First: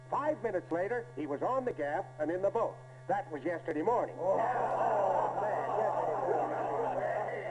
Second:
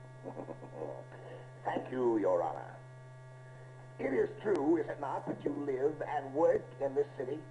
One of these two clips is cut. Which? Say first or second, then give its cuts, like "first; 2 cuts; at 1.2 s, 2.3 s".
second; 1 cut; at 2.4 s